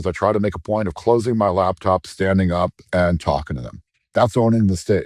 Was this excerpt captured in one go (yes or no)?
yes